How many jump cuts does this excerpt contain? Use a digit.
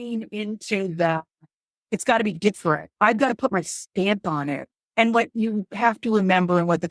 1